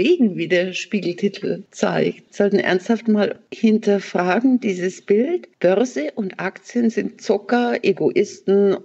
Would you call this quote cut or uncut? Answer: cut